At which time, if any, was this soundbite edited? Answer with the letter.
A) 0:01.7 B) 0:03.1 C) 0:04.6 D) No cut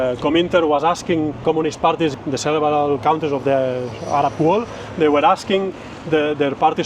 A